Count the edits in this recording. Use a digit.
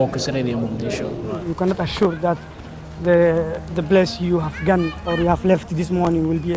1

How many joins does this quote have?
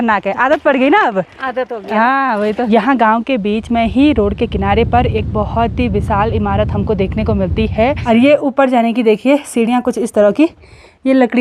2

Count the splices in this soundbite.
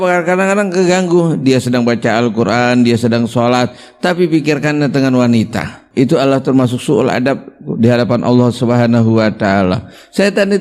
1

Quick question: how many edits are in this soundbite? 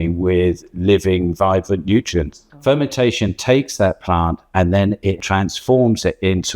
2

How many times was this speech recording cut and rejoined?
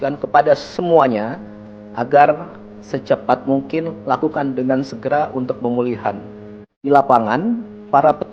1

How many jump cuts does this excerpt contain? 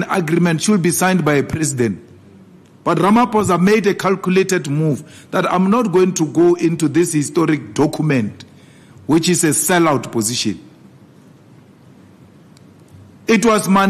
0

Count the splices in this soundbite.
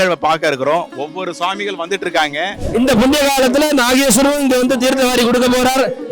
1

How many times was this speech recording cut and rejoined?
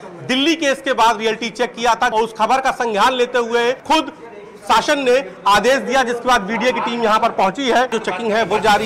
3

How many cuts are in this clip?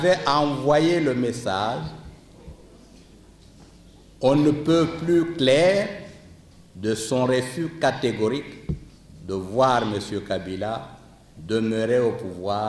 0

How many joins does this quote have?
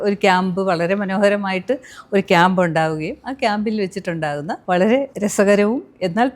2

